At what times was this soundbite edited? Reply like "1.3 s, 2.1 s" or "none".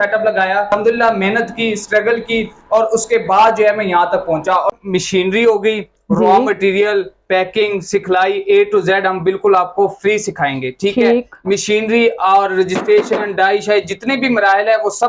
0.7 s, 4.7 s